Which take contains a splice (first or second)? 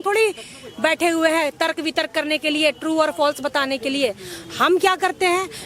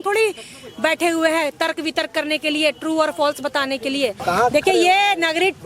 second